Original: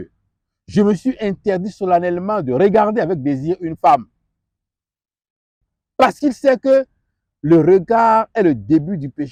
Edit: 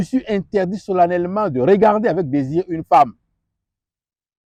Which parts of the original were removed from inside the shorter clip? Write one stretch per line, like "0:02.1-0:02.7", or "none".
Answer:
none